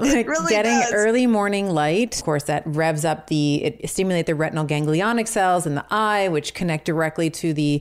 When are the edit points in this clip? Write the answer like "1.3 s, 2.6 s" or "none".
2.2 s, 3.8 s